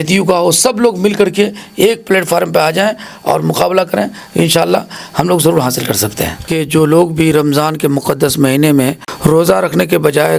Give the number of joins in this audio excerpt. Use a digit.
2